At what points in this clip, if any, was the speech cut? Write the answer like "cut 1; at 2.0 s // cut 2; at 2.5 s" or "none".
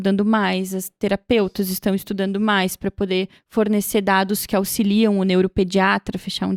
none